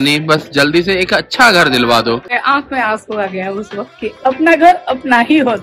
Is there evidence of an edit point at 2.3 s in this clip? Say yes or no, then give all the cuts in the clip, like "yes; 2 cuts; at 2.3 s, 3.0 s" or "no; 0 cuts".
yes; 1 cut; at 2.3 s